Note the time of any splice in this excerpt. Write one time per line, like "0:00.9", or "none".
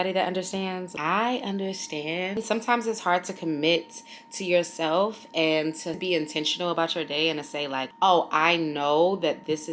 0:00.9
0:02.4
0:07.9